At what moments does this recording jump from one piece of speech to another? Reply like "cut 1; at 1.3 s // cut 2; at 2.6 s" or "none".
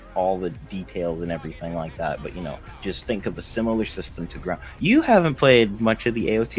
none